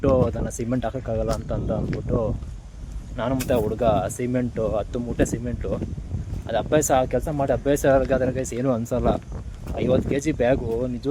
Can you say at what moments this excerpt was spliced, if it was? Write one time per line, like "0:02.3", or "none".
none